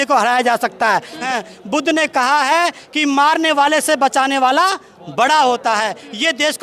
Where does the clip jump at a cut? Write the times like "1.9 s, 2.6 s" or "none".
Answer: 1.2 s